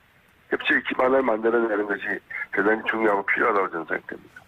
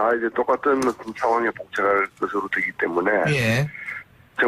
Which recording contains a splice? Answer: second; 1 cut; at 1.9 s

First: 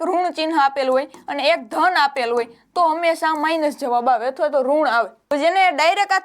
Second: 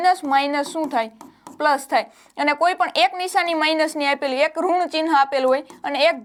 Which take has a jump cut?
first; 1 cut; at 5.3 s

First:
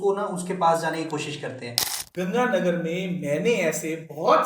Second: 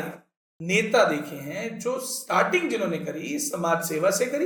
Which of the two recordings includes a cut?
first; 1 cut; at 1.9 s

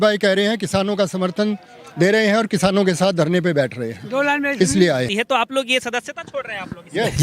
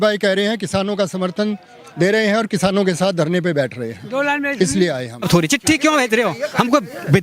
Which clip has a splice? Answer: second; 1 cut; at 5.1 s

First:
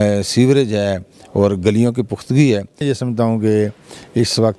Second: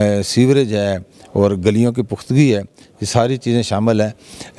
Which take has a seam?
first; 1 cut; at 2.8 s

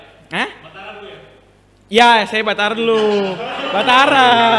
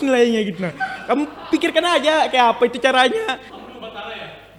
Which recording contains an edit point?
second; 1 cut; at 3.4 s

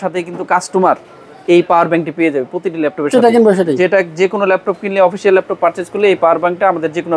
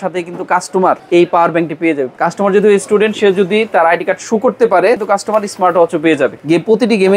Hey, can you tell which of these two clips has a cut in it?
second; 4 cuts; at 1.0 s, 2.1 s, 5.0 s, 6.4 s

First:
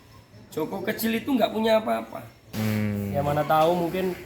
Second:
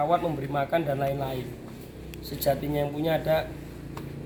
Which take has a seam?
first; 1 cut; at 2.4 s

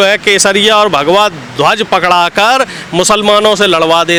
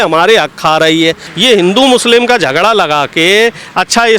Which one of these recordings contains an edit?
second; 1 cut; at 1.3 s

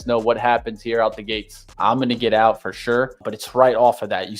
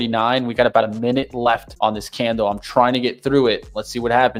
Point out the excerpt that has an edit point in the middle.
first; 1 cut; at 1.7 s

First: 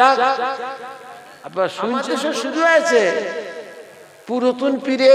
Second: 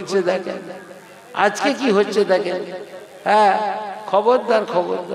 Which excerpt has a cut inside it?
first; 1 cut; at 2.2 s

